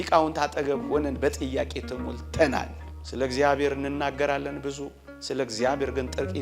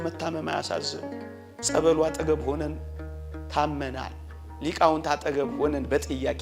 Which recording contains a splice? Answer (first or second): first